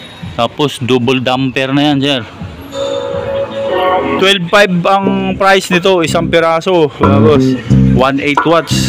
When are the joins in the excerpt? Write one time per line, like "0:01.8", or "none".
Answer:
0:03.7